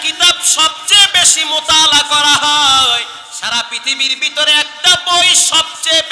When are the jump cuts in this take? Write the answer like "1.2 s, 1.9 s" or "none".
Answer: 3.2 s